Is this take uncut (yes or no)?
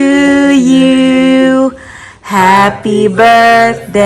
yes